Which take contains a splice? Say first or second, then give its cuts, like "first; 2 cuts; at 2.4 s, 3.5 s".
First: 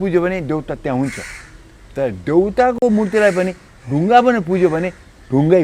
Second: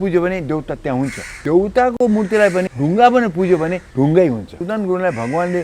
second; 4 cuts; at 1.4 s, 2.7 s, 3.8 s, 4.6 s